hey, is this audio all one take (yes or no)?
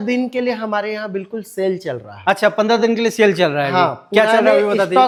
yes